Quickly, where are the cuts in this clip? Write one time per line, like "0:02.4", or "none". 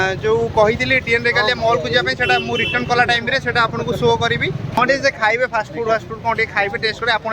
0:04.8